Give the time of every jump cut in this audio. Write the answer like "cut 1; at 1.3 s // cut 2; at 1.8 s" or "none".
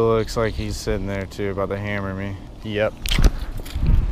cut 1; at 2.5 s